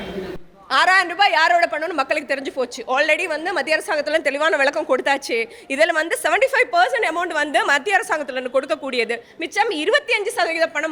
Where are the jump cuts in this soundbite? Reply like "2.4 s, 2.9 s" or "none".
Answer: none

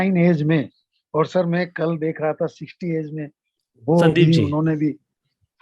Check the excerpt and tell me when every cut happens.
3.7 s

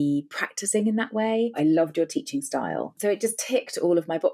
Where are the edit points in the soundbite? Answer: 1.6 s, 2.9 s

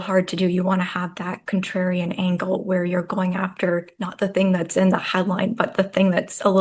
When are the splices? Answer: none

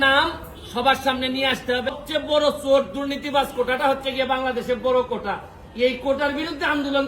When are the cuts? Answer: 2.0 s

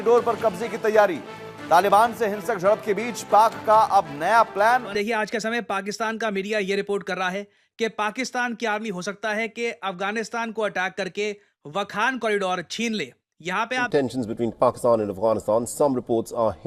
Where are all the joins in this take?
5.0 s, 13.9 s

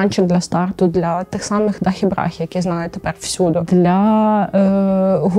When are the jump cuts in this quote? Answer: none

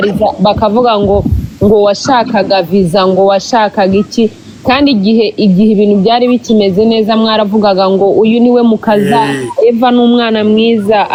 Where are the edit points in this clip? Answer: none

